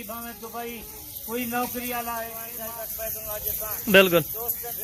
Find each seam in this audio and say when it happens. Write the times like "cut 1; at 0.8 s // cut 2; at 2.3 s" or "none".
cut 1; at 2.4 s